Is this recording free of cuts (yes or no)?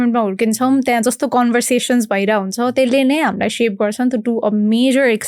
yes